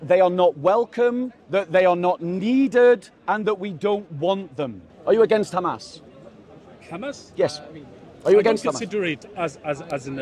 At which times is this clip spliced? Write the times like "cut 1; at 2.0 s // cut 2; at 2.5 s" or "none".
cut 1; at 1.3 s // cut 2; at 3.1 s // cut 3; at 4.9 s